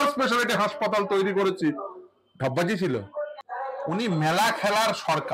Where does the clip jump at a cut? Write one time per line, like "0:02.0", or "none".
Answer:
0:03.3